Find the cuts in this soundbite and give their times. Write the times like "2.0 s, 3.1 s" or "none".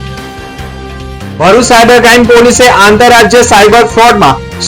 1.3 s